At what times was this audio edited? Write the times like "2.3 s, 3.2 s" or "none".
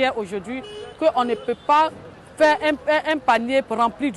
none